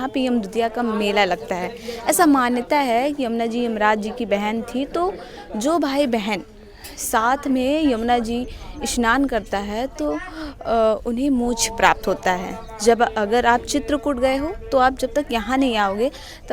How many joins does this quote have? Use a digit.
0